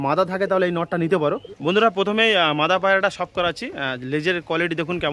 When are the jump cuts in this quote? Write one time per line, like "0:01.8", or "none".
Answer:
0:01.5